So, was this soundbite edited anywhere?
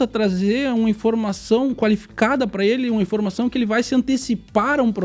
no; 0 cuts

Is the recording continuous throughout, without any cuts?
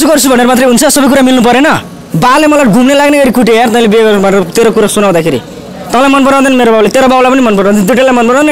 yes; 0 cuts

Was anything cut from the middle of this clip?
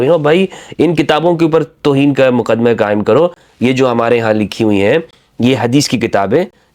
no; 0 cuts

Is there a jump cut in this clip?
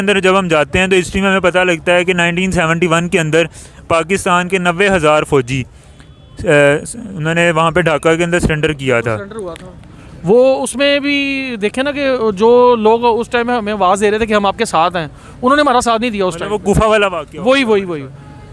no; 0 cuts

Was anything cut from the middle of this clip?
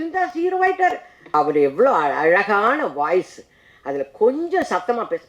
yes; 1 cut; at 1.2 s

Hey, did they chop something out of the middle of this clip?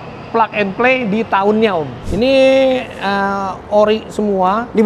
yes; 1 cut; at 2.0 s

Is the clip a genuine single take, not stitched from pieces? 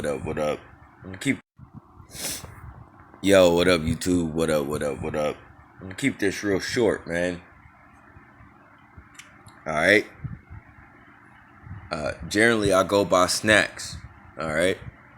no; 1 cut; at 1.4 s

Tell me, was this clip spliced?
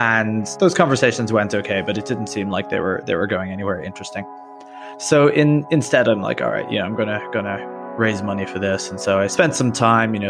no; 0 cuts

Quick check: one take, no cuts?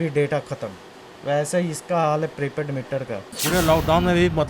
no; 1 cut; at 3.4 s

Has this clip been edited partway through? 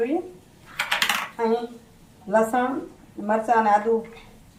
no; 0 cuts

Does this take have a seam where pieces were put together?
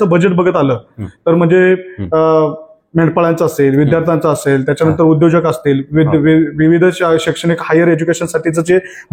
no; 0 cuts

